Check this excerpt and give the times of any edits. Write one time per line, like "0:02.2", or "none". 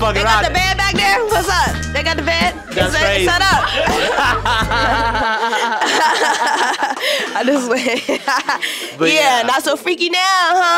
none